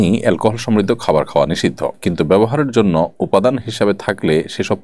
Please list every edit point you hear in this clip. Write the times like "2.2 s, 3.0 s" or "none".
none